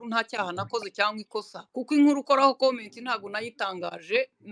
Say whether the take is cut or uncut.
cut